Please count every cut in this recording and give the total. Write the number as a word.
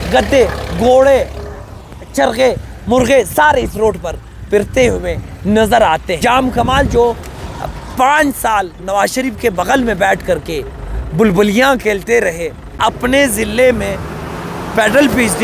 two